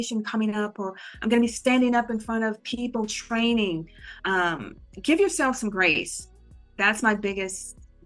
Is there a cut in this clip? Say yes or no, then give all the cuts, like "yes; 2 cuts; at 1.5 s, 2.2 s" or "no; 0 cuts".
no; 0 cuts